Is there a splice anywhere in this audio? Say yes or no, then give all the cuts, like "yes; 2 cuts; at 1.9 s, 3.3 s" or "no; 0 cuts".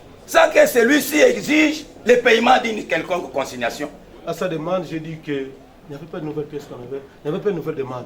yes; 1 cut; at 4.1 s